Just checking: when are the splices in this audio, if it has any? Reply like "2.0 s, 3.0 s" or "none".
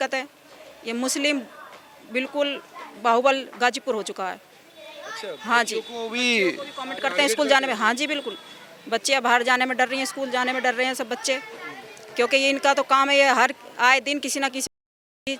none